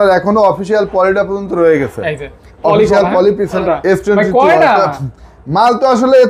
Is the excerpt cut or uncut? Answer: cut